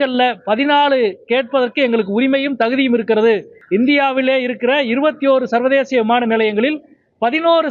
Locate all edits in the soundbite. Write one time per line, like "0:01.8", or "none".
0:03.5